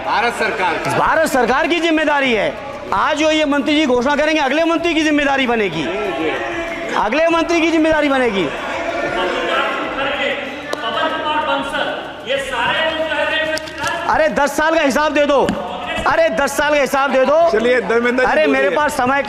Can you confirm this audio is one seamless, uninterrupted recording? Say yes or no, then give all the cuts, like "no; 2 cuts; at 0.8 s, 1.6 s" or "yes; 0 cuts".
yes; 0 cuts